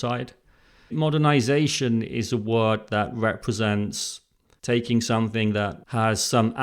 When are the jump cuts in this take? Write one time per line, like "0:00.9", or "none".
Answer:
0:00.9